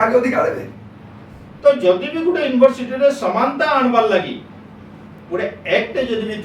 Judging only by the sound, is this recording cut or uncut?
cut